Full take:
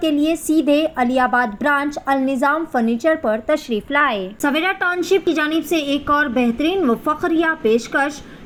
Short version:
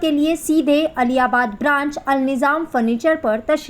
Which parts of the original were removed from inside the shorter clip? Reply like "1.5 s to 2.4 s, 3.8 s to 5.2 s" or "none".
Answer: none